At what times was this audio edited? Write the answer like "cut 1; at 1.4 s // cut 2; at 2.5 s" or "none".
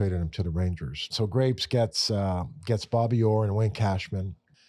cut 1; at 1.1 s